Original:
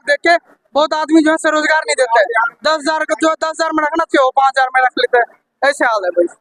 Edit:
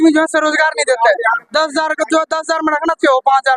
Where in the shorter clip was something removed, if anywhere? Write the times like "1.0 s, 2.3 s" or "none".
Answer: none